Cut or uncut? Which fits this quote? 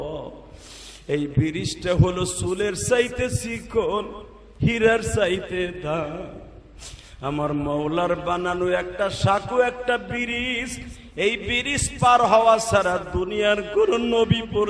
uncut